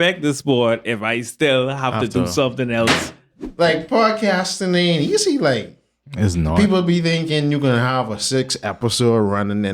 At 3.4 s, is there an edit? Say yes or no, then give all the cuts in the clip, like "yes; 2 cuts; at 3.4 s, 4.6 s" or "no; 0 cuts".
yes; 1 cut; at 3.4 s